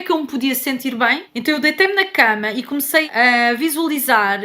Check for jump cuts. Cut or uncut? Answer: cut